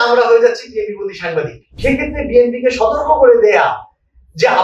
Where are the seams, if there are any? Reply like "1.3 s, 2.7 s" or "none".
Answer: 1.7 s